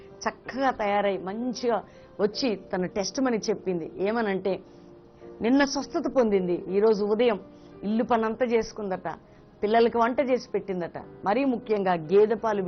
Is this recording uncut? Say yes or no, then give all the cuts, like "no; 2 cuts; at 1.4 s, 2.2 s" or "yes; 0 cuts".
no; 1 cut; at 9.7 s